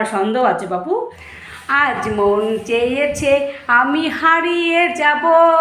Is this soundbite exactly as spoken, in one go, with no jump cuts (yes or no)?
no